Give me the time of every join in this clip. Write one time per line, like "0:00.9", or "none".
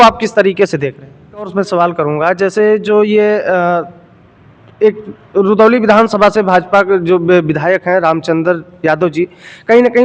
0:01.5

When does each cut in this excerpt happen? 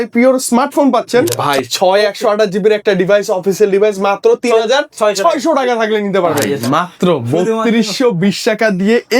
0:01.3
0:06.5

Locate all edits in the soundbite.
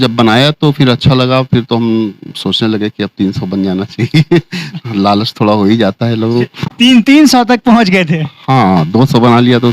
none

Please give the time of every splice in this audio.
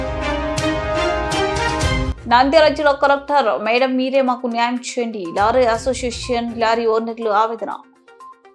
none

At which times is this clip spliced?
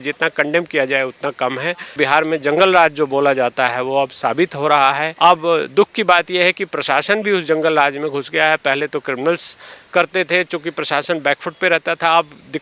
0:02.0
0:05.1

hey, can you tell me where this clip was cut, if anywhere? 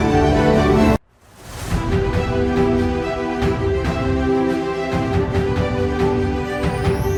none

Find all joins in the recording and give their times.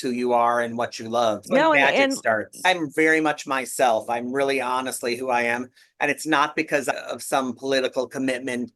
0:01.5
0:02.7

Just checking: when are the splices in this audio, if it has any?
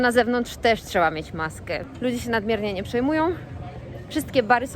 0:01.8

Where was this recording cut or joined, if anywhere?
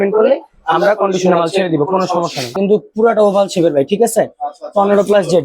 0:02.5

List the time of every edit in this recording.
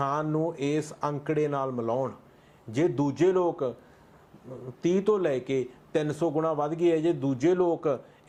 none

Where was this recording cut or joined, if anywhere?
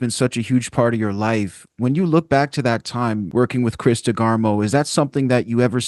0:03.2

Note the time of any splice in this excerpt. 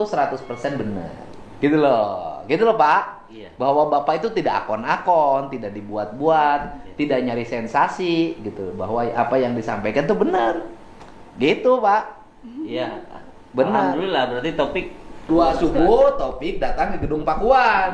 0:15.3

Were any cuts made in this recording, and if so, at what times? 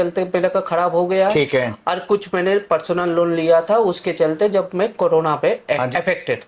none

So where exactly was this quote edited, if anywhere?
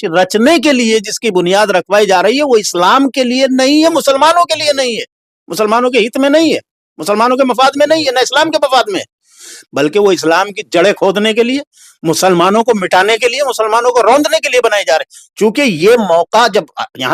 none

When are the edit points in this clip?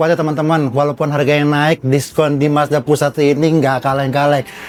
none

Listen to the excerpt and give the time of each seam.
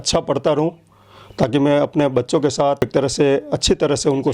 0:02.8

